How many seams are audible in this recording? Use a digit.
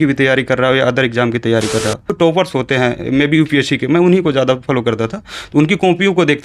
1